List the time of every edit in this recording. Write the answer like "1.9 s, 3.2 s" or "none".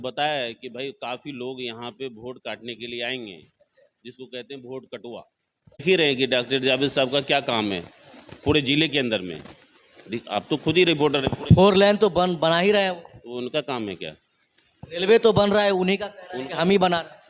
5.8 s